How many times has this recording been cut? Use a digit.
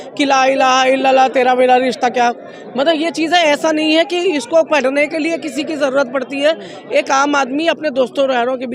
0